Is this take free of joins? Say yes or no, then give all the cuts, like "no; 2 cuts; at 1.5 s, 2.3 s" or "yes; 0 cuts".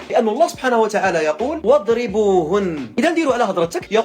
no; 1 cut; at 2.8 s